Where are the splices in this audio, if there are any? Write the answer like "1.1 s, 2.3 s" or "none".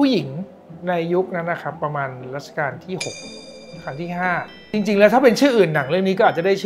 4.6 s